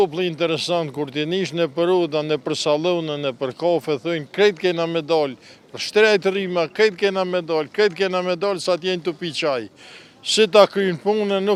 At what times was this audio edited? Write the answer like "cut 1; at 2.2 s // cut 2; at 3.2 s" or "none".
none